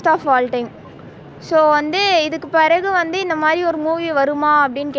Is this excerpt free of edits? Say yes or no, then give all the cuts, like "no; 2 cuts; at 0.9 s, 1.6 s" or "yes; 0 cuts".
yes; 0 cuts